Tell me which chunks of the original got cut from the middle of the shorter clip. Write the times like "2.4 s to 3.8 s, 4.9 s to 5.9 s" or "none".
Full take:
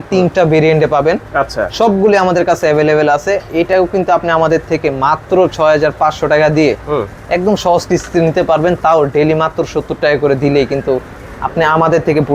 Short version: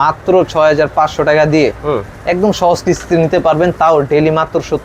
none